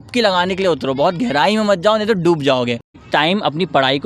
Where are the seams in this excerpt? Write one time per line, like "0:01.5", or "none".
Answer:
0:03.0